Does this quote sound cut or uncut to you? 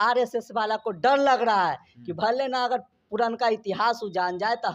uncut